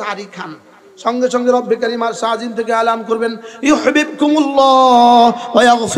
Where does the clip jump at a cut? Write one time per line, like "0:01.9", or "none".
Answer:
none